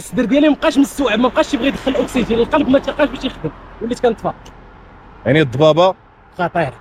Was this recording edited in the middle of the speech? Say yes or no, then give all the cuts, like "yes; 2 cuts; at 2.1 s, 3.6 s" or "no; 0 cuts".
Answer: no; 0 cuts